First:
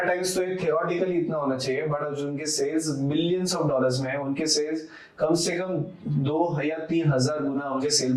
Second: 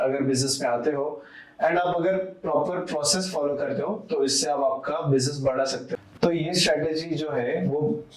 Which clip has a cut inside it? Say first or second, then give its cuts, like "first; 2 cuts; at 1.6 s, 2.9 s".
second; 1 cut; at 5.9 s